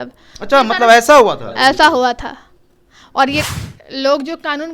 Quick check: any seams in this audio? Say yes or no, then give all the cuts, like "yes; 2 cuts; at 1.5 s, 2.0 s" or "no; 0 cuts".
yes; 1 cut; at 3.4 s